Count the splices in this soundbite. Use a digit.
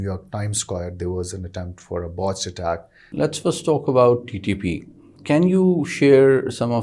2